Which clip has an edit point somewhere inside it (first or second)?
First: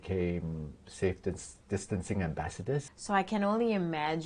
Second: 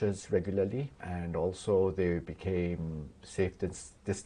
first